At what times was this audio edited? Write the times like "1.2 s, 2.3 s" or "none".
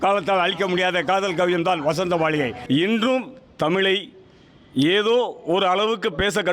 2.6 s